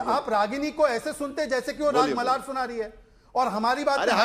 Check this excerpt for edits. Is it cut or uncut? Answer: uncut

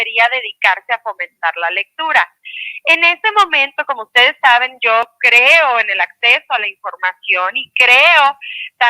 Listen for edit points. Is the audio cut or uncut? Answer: uncut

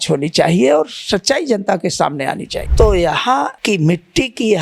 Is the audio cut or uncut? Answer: cut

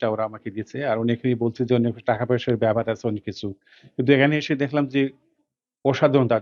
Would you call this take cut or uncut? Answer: uncut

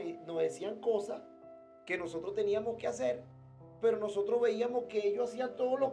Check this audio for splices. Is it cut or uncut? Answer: uncut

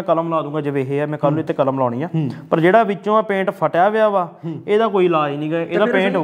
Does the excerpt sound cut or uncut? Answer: uncut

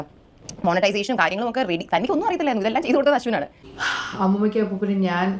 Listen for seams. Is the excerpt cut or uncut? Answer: cut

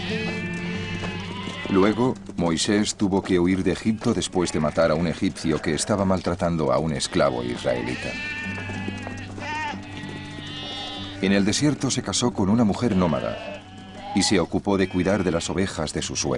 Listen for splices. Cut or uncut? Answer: uncut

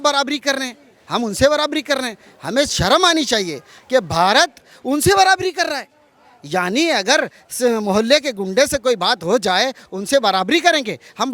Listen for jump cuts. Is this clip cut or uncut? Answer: uncut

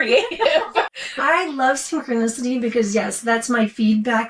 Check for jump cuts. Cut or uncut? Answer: cut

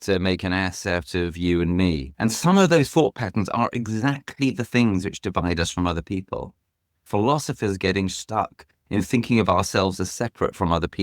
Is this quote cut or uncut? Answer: cut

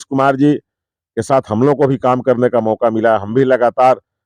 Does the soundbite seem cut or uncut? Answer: uncut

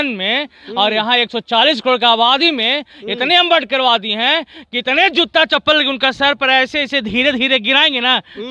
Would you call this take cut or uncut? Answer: uncut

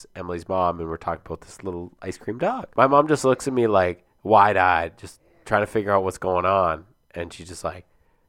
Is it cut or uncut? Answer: cut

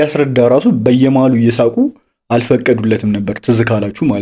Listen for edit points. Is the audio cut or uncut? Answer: uncut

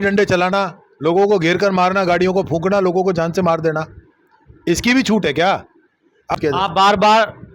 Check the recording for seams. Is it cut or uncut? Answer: cut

